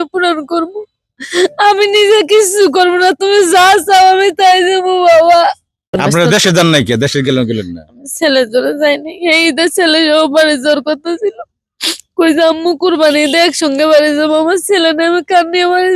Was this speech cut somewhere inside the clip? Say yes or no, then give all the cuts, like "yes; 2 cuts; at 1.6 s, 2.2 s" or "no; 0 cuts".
yes; 1 cut; at 6.0 s